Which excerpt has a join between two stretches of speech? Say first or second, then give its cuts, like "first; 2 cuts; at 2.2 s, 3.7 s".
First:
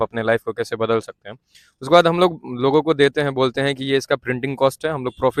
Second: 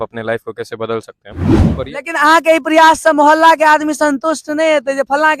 second; 1 cut; at 1.7 s